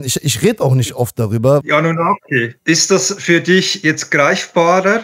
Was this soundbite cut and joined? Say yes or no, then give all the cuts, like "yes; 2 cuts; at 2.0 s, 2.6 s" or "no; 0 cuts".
yes; 2 cuts; at 1.6 s, 2.6 s